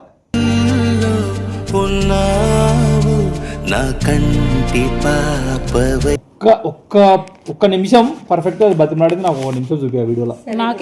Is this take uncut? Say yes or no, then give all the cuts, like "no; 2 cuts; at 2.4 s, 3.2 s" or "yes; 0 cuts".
no; 1 cut; at 6.3 s